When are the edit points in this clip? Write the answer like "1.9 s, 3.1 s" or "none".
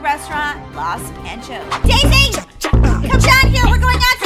1.8 s